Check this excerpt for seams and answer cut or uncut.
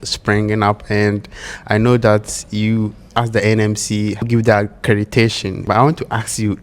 cut